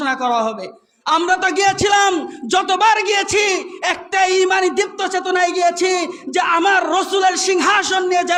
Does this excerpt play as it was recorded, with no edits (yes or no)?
yes